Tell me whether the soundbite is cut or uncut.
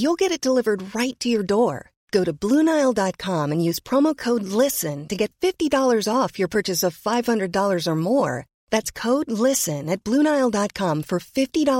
uncut